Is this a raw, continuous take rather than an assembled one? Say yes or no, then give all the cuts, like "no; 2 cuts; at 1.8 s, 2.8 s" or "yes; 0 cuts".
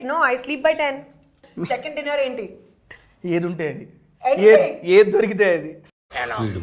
no; 1 cut; at 1.5 s